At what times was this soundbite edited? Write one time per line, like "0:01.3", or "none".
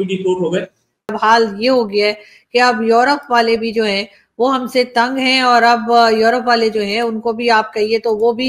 0:01.1

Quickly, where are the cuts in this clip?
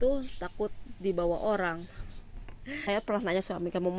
0:02.9

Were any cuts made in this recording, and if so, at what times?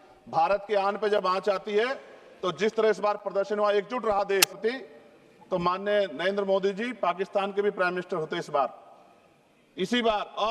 0:04.6

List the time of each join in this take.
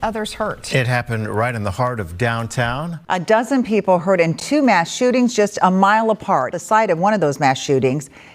0:03.0
0:06.5

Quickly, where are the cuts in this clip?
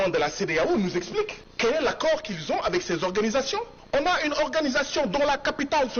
0:01.4
0:03.7

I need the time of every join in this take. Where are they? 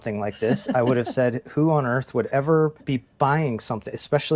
0:02.8

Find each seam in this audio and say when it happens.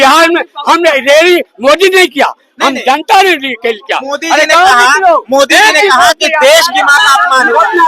none

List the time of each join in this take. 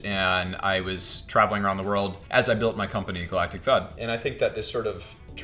0:02.2
0:03.9

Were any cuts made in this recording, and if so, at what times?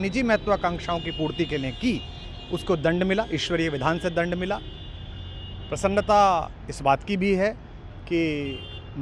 none

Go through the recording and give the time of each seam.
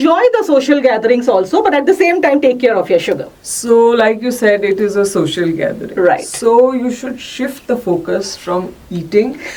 none

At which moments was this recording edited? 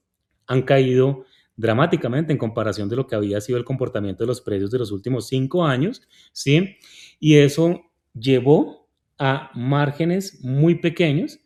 none

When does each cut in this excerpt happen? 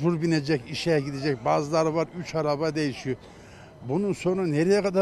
none

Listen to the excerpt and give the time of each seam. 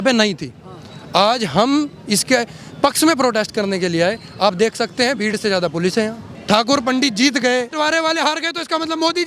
0:06.3
0:07.7

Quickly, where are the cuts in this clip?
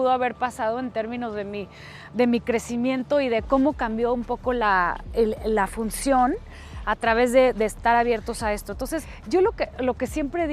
0:09.1

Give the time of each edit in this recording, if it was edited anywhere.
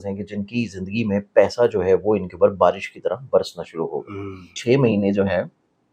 0:04.5

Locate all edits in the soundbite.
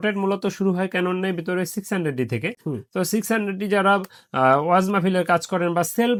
none

